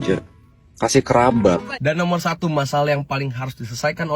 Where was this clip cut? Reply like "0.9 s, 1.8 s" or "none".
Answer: 1.7 s